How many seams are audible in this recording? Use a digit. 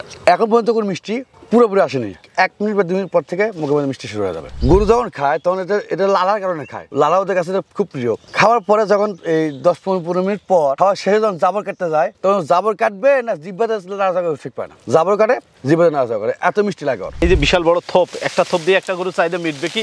2